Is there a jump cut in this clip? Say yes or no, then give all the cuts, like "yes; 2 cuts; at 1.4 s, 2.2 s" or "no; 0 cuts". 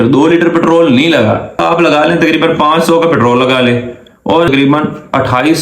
yes; 2 cuts; at 1.6 s, 4.5 s